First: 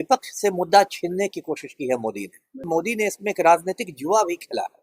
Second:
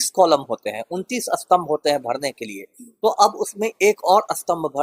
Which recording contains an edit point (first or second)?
first